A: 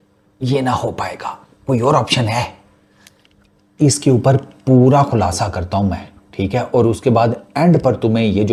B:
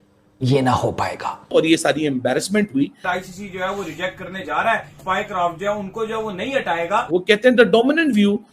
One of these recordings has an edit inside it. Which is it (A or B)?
B